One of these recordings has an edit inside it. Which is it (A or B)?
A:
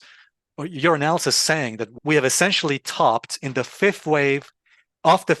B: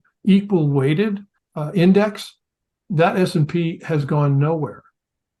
A